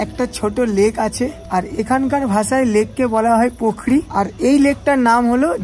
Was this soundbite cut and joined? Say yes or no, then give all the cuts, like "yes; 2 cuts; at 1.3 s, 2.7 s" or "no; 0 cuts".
yes; 2 cuts; at 1.4 s, 4.1 s